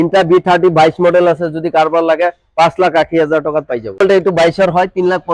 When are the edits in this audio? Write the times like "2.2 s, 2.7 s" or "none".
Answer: 4.0 s